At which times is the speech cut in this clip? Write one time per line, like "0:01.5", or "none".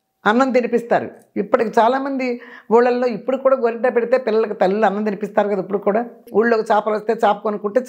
0:06.2